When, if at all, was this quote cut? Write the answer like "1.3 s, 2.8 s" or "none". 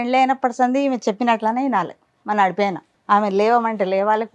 2.9 s